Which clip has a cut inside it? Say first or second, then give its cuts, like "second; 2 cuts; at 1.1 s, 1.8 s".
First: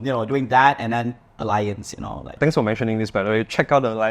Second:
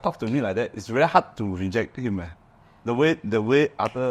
first; 1 cut; at 2.4 s